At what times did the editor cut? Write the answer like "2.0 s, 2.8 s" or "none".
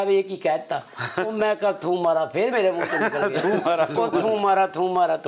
none